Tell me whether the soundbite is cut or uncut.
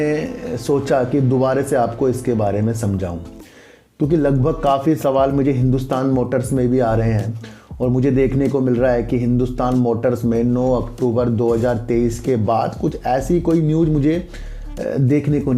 uncut